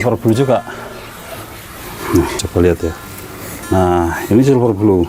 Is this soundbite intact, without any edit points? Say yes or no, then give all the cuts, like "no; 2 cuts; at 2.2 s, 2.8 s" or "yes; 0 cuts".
no; 1 cut; at 2.5 s